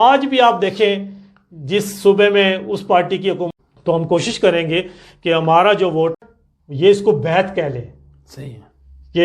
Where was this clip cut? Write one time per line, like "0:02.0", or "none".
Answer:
0:03.5
0:06.2